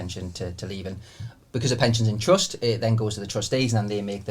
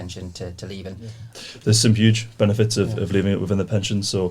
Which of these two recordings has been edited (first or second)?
second